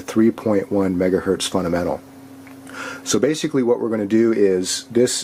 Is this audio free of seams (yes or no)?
yes